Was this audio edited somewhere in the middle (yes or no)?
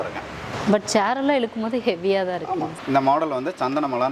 yes